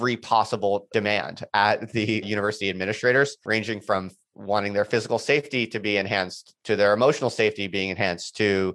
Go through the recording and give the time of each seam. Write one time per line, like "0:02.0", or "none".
0:00.9
0:02.2
0:03.5